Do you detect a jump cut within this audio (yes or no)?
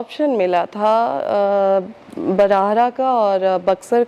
no